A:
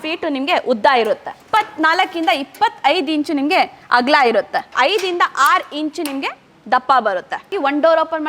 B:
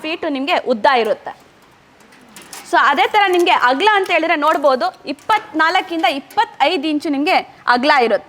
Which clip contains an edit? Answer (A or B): A